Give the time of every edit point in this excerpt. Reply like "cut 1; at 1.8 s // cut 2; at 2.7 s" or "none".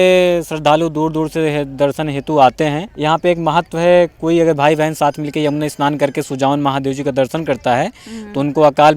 cut 1; at 2.9 s